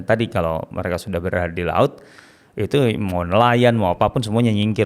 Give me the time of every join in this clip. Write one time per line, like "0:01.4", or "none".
none